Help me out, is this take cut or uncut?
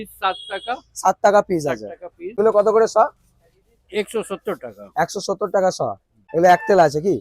cut